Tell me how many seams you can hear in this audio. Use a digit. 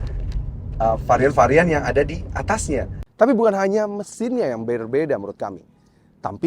1